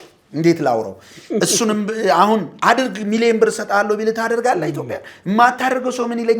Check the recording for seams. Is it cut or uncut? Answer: uncut